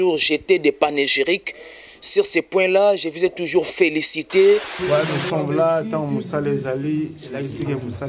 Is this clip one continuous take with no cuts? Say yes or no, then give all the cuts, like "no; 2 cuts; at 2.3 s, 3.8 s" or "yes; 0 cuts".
no; 1 cut; at 4.7 s